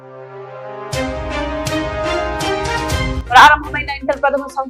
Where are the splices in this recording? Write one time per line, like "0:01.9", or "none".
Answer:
0:03.2